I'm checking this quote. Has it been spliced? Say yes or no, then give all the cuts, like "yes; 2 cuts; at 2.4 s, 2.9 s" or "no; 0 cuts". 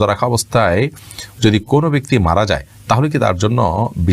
no; 0 cuts